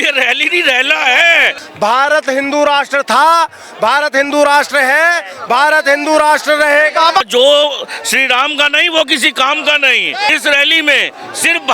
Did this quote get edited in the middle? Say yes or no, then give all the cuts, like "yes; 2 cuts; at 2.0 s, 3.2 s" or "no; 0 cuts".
yes; 3 cuts; at 1.6 s, 7.2 s, 10.3 s